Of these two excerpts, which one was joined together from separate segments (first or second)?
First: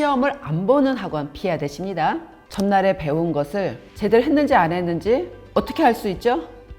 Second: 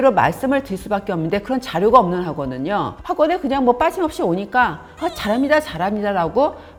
first